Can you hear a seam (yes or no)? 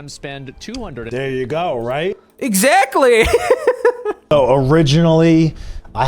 yes